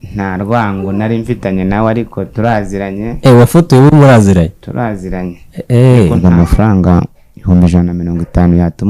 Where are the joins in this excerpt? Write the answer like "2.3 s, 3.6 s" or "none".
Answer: 6.2 s